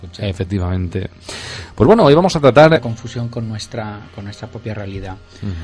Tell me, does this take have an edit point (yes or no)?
no